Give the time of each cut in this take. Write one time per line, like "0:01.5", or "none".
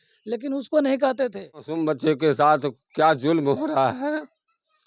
0:01.7